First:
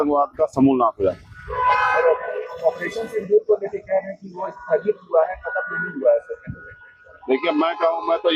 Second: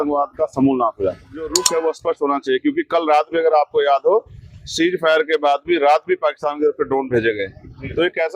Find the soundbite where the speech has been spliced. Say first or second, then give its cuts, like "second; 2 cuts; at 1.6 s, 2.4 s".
second; 1 cut; at 1.6 s